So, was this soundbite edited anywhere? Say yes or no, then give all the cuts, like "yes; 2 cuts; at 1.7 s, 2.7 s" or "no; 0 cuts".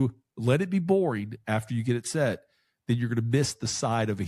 no; 0 cuts